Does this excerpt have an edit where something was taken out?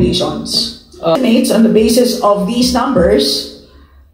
yes; 1 cut; at 1.2 s

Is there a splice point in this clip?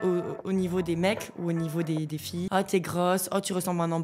yes; 1 cut; at 2.5 s

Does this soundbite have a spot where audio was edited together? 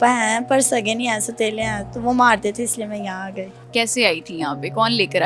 yes; 1 cut; at 3.6 s

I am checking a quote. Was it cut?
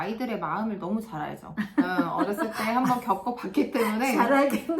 no; 0 cuts

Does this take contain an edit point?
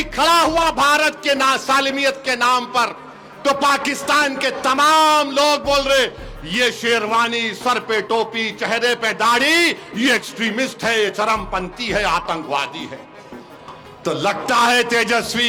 no; 0 cuts

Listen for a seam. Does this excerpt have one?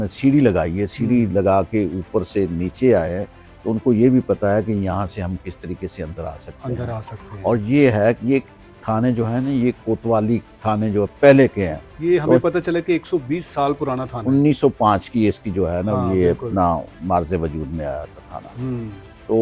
no; 0 cuts

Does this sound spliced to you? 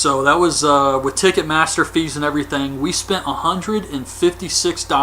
yes; 1 cut; at 3.6 s

